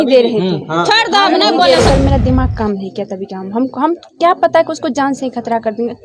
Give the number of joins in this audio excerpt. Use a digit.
1